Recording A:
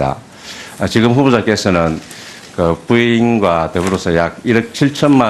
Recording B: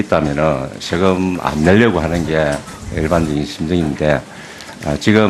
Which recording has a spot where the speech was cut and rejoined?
A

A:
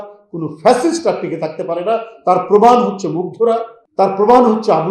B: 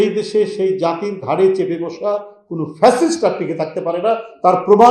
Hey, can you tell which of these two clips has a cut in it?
A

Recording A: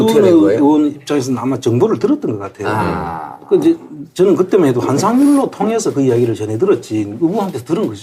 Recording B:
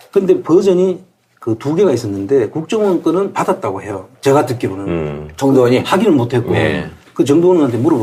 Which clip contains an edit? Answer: A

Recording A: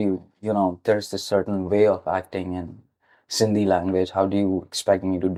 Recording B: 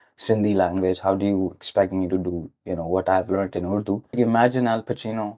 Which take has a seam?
B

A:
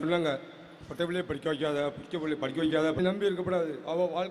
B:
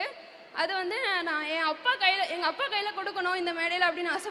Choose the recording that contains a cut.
A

